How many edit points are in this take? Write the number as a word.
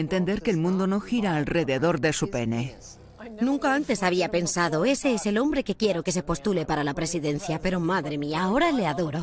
zero